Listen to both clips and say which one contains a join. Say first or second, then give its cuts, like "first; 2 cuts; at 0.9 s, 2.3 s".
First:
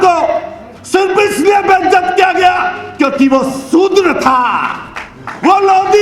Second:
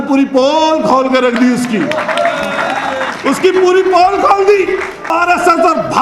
second; 1 cut; at 5.1 s